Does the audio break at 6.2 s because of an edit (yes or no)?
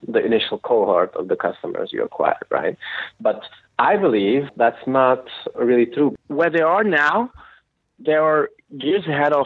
yes